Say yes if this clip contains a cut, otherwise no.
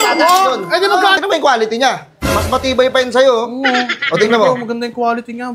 yes